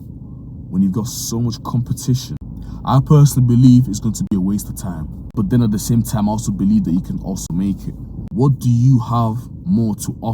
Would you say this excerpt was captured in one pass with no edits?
no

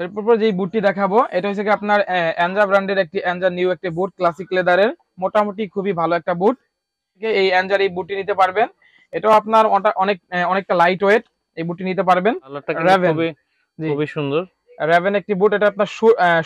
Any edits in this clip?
yes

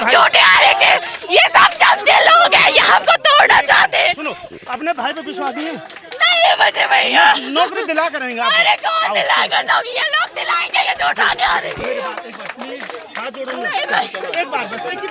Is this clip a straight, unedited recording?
yes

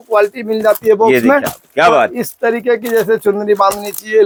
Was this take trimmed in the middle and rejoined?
no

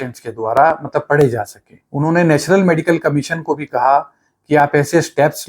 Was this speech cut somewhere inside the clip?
yes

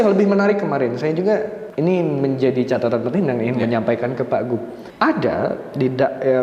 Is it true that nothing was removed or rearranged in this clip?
no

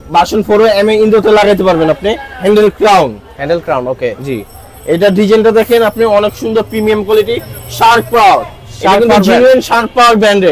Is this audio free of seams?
yes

